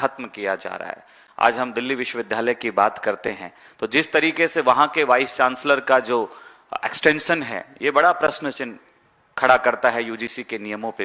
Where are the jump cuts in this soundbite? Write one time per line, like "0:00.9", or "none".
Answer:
none